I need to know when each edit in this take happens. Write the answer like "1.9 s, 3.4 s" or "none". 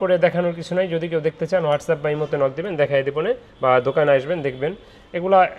none